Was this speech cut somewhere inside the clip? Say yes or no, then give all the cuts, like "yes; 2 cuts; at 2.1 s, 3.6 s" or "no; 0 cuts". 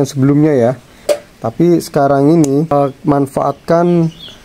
yes; 2 cuts; at 0.9 s, 2.7 s